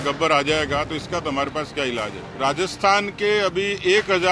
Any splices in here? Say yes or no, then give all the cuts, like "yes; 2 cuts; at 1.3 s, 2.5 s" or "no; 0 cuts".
yes; 1 cut; at 2.2 s